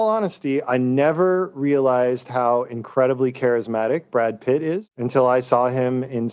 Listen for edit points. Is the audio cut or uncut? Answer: uncut